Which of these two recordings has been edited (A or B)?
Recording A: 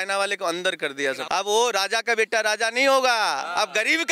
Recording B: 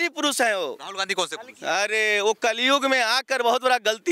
A